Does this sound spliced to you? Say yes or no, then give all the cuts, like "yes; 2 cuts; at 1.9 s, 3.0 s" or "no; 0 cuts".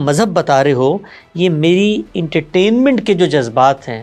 no; 0 cuts